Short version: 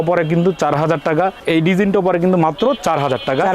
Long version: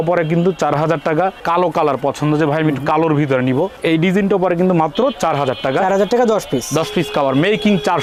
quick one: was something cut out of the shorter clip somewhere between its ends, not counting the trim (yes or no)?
yes